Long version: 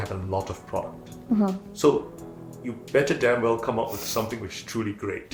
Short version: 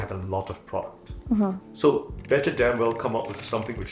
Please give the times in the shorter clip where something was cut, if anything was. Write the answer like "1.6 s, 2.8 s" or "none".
2.1 s